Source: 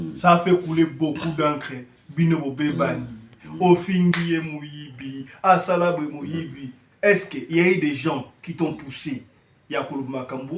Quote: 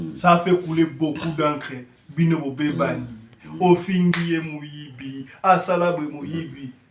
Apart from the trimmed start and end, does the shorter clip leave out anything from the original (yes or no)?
no